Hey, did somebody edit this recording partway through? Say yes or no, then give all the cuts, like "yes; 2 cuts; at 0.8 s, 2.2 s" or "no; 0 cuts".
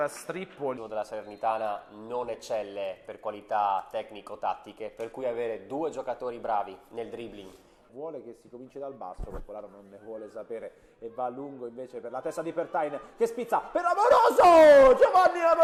no; 0 cuts